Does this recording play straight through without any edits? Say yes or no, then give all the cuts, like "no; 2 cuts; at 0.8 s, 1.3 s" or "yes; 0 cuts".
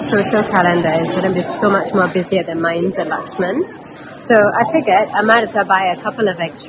yes; 0 cuts